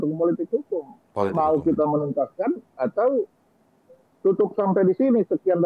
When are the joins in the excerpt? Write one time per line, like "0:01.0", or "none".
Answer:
none